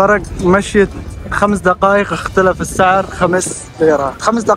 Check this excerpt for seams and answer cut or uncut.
uncut